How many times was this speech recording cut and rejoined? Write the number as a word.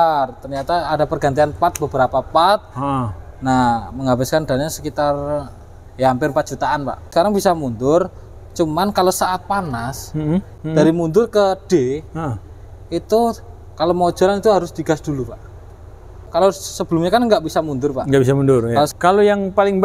four